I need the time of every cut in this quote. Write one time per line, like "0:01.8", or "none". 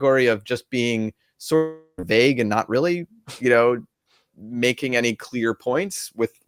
none